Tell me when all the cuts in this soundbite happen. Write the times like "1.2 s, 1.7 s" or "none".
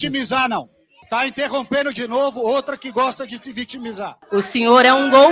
1.0 s, 4.1 s